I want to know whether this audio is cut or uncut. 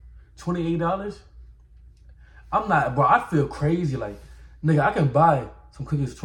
uncut